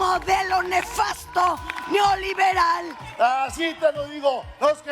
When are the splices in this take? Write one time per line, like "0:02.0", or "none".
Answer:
0:03.0

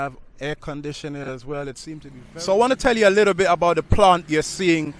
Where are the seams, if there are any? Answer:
0:02.1

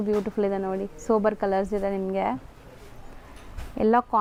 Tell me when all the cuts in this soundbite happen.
none

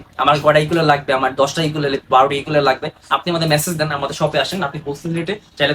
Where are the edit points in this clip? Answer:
none

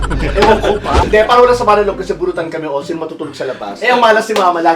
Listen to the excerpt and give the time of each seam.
0:01.0
0:03.8

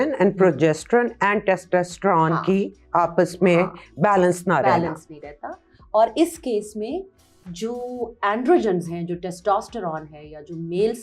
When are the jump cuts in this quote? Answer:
none

